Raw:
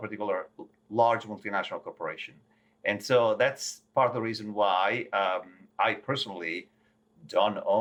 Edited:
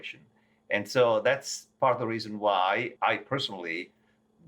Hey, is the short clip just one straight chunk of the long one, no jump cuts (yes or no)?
no